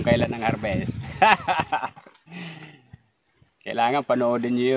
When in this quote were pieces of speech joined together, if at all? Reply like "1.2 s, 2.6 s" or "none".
none